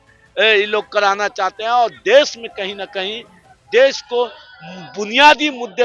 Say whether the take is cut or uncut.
uncut